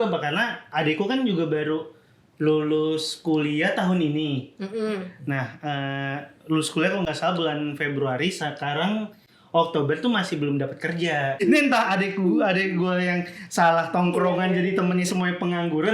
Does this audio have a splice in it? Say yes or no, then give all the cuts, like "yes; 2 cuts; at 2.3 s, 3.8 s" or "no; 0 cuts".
yes; 1 cut; at 11.4 s